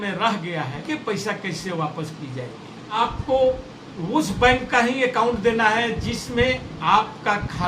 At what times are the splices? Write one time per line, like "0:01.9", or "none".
0:00.8
0:03.0